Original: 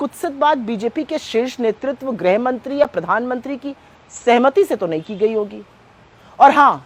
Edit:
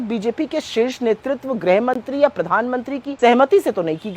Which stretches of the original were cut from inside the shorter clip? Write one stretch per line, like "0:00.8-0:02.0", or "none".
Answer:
0:03.6-0:04.0

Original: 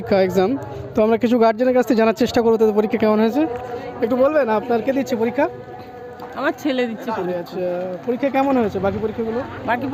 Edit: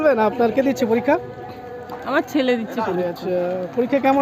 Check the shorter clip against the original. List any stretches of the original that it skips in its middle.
none

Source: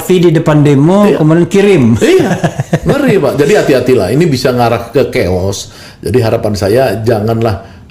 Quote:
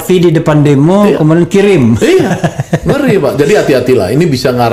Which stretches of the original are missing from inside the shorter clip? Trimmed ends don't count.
none

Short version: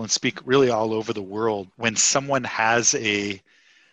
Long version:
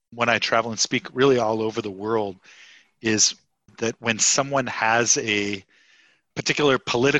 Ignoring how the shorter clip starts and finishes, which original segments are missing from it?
0:02.4-0:04.0

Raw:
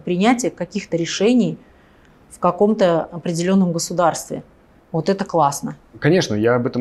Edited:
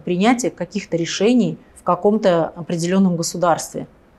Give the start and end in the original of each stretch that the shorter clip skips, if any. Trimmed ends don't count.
0:01.7-0:02.2

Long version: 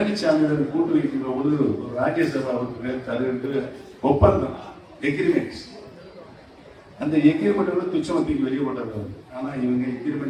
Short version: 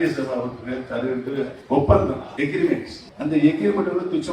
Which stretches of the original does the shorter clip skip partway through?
0:03.7-0:03.9
0:04.6-0:04.9
0:05.7-0:06.8

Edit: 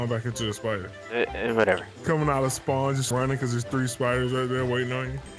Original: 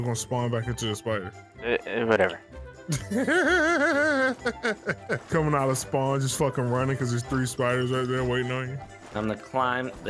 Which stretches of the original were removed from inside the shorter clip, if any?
0:01.4-0:01.5
0:02.4-0:05.2
0:06.3-0:06.7

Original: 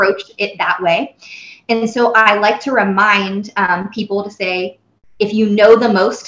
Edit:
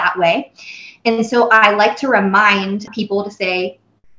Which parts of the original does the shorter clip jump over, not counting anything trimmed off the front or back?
0:03.5-0:03.9

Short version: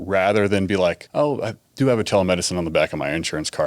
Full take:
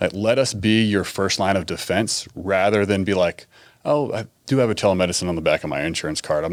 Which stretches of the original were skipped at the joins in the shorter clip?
0:03.4-0:03.7

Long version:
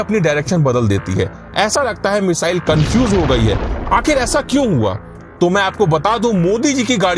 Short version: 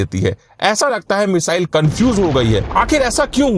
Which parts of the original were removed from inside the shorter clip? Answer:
0:03.6-0:03.8

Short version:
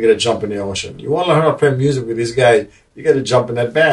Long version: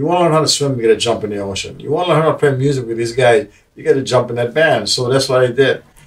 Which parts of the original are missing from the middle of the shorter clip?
none

